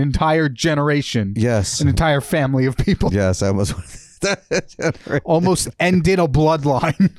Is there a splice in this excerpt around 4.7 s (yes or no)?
no